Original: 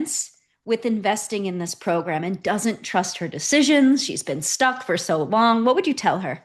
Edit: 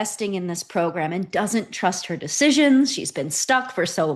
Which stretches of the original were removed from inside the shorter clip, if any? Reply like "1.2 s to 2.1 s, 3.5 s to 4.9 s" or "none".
none